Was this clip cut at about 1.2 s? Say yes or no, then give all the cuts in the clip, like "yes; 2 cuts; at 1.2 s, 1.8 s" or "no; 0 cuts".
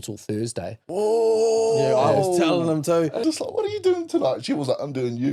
no; 1 cut; at 3.2 s